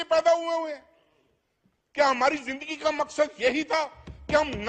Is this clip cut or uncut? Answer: uncut